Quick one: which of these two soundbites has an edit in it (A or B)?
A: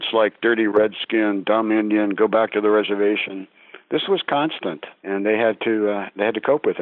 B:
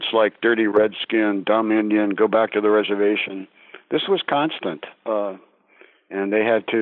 A